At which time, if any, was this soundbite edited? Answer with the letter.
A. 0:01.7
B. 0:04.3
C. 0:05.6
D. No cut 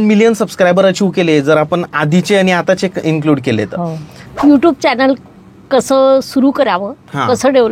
B